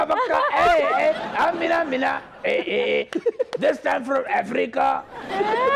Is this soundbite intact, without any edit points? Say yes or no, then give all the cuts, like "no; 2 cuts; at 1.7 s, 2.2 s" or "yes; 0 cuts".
yes; 0 cuts